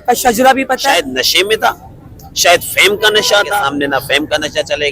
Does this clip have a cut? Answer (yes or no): yes